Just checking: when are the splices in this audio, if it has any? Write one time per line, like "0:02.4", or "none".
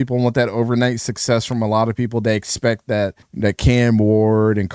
0:03.2